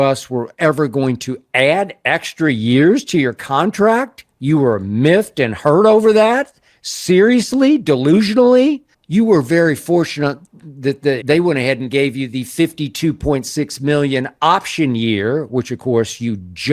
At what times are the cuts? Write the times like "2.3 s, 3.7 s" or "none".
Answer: 8.9 s, 11.2 s